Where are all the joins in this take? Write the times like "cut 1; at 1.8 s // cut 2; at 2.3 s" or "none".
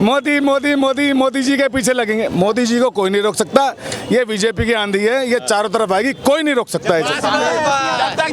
none